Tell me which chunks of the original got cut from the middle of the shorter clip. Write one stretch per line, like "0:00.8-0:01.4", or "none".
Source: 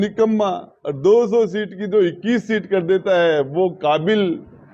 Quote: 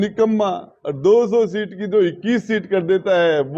none

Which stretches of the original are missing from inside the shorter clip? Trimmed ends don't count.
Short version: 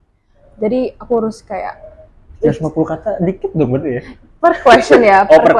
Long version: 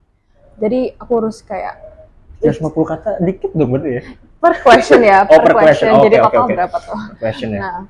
none

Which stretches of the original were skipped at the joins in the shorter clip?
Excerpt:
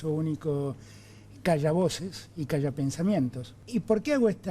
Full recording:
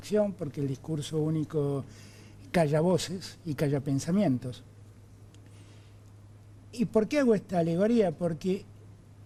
0:04.6-0:06.6

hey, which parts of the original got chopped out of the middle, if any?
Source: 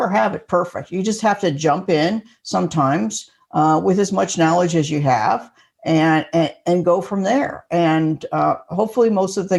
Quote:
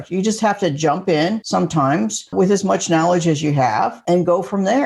0:02.2-0:02.4
0:03.3-0:03.8
0:05.5-0:06.6

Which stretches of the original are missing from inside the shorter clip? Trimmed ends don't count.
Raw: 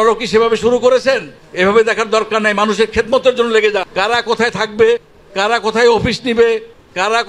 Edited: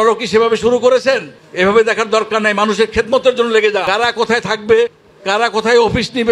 0:03.8-0:03.9

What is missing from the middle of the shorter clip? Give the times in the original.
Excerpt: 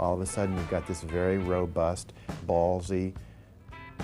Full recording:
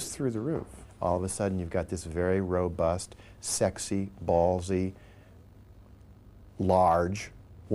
0:03.4-0:04.1

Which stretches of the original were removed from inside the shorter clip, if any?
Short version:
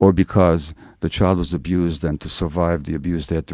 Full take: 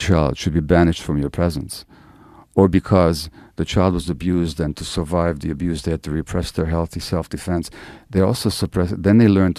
none

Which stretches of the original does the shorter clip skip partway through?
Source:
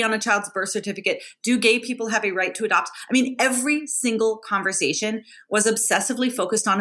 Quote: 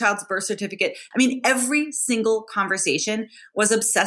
0:01.3-0:03.0

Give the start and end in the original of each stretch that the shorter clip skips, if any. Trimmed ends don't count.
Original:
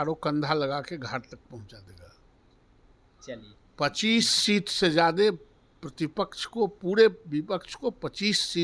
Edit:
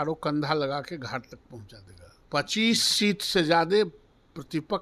0:02.1-0:03.6

